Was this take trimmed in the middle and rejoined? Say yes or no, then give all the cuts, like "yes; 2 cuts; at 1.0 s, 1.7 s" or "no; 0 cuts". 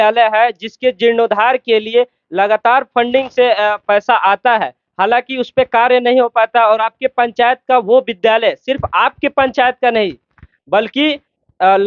no; 0 cuts